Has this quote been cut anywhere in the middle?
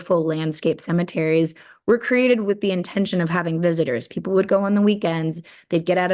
no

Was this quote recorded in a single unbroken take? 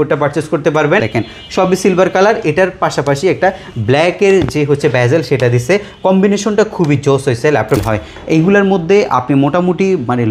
no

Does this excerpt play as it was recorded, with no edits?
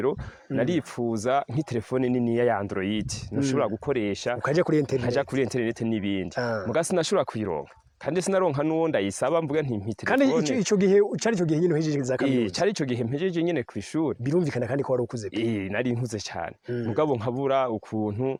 yes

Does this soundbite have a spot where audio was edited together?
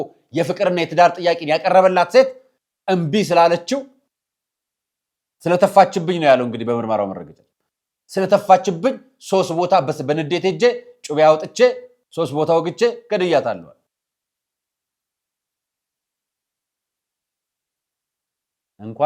no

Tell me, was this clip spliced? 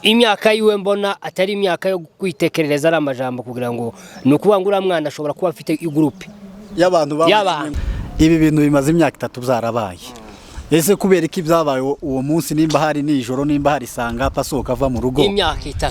yes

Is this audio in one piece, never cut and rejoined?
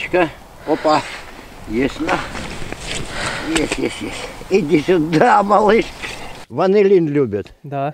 no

